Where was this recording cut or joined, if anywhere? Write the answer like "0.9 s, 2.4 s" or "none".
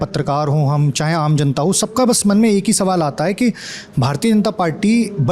none

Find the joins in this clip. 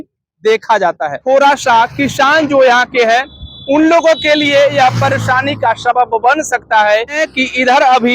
1.2 s, 7.2 s

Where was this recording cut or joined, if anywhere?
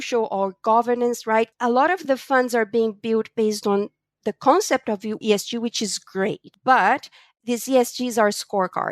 1.5 s, 6.5 s

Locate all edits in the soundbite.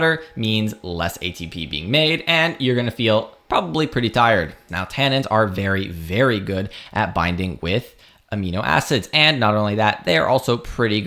4.6 s

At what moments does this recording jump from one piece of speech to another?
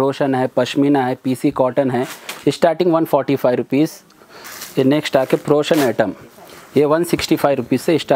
none

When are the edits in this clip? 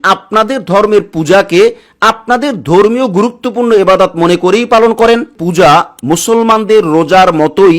5.3 s

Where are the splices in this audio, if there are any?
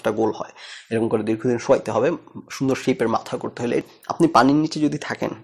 3.8 s

